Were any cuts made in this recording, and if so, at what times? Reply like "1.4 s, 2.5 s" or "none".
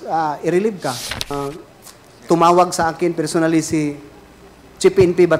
1.3 s